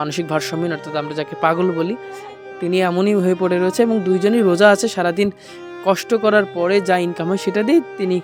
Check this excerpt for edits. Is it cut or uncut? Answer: uncut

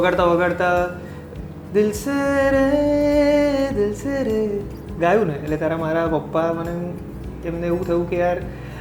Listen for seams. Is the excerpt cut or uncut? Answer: uncut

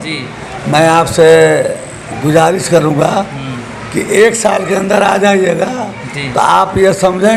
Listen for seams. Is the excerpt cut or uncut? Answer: uncut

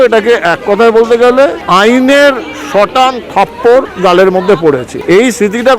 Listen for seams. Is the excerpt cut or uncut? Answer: cut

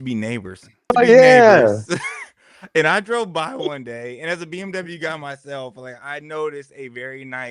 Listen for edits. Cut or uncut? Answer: cut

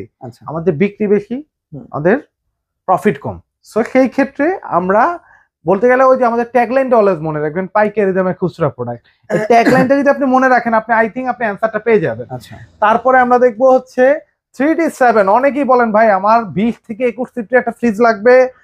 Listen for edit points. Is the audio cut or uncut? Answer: uncut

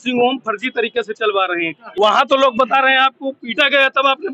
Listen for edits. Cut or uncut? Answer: cut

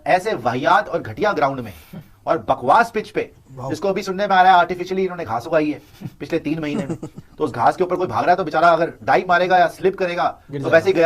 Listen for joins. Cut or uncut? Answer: uncut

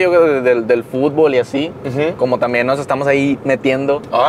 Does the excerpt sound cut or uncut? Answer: uncut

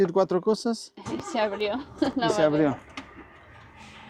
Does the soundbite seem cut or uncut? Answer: uncut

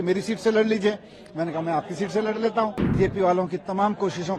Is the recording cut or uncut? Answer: cut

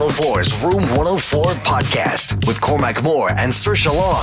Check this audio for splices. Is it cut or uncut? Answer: uncut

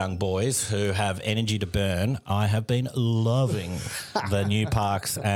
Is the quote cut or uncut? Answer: uncut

